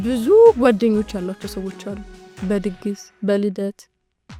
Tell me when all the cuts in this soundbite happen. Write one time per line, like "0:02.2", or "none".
none